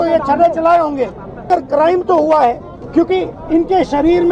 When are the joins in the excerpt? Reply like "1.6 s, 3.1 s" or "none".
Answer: 1.5 s, 2.7 s